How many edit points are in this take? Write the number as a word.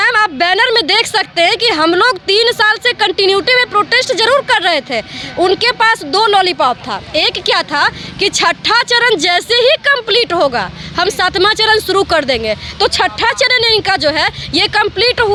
zero